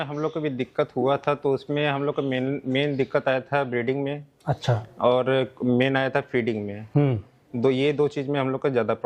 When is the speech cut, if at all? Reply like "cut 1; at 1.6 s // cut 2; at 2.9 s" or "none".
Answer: none